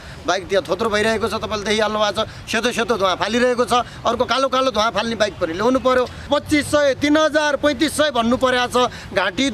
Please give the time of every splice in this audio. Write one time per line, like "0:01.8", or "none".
0:06.2